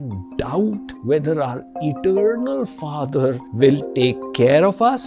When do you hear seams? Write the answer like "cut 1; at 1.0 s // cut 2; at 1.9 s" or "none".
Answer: cut 1; at 0.9 s // cut 2; at 3.5 s